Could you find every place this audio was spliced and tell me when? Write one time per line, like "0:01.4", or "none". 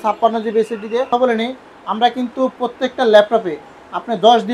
0:01.1